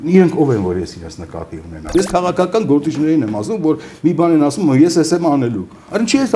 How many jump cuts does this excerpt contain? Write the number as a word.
one